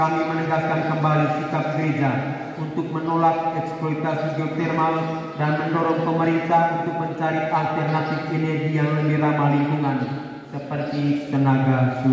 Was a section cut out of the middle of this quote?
no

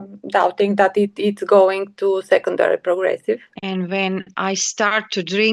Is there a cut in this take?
yes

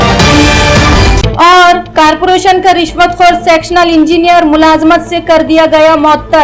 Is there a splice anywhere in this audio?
yes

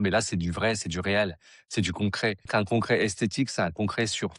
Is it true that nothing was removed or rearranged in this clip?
no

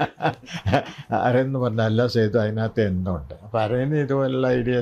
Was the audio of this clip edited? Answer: no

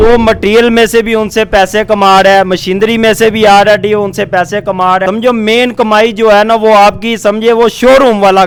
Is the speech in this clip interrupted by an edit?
no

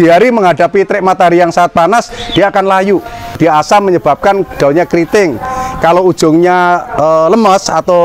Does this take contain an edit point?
yes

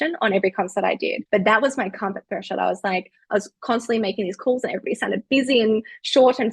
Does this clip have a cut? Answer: yes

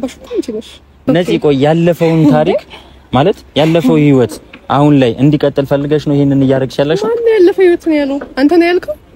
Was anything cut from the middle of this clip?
yes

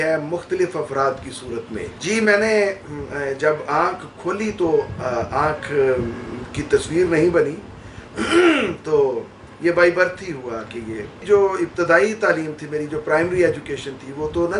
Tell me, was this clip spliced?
no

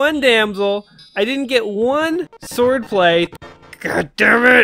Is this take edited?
yes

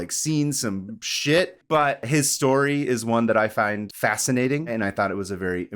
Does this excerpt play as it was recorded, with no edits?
no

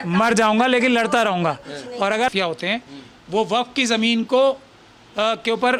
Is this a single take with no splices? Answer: yes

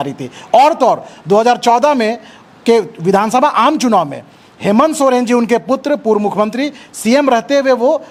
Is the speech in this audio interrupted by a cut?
no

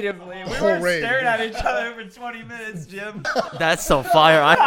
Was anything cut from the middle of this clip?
yes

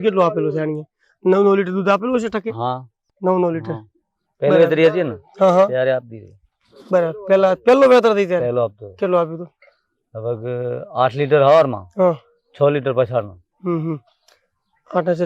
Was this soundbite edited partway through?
no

